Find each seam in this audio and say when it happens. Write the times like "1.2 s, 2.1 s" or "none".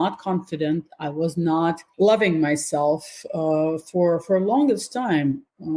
1.8 s